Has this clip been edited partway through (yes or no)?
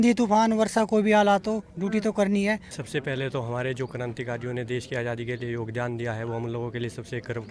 yes